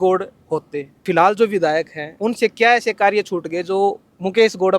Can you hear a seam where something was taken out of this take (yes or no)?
yes